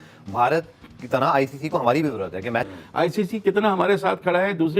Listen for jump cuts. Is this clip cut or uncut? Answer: cut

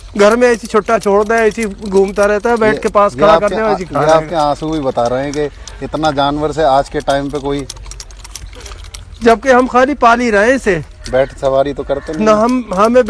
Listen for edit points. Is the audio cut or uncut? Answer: uncut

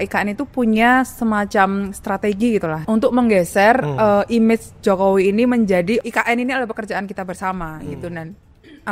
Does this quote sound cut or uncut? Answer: cut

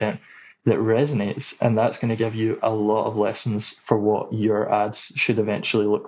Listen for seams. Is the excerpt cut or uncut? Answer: uncut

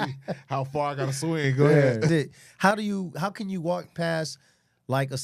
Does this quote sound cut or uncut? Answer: cut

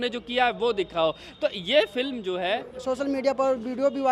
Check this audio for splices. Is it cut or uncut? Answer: cut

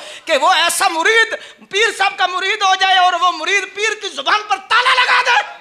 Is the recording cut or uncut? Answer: uncut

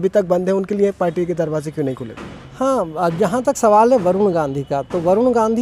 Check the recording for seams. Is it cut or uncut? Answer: uncut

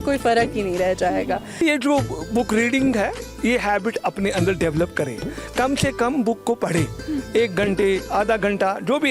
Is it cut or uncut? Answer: cut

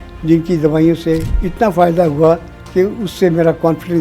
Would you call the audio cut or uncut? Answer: cut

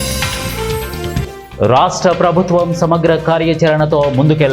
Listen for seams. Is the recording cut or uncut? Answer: uncut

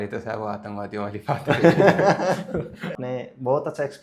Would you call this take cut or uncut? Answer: cut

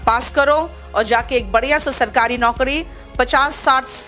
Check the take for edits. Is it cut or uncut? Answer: uncut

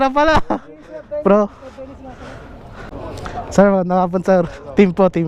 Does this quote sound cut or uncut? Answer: cut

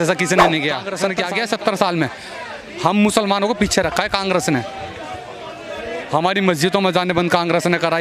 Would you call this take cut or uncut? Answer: cut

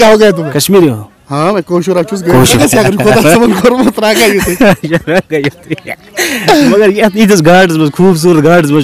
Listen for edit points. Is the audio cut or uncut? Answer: cut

